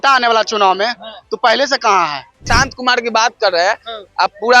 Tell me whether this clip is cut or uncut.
cut